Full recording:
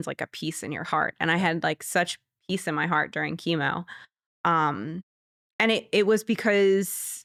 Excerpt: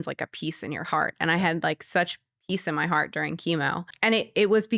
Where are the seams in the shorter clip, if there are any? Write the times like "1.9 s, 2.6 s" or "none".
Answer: 3.9 s